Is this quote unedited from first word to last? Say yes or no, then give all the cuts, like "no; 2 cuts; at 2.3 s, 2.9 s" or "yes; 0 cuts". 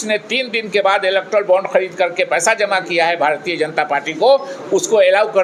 yes; 0 cuts